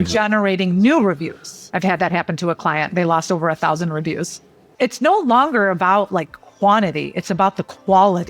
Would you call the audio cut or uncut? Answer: cut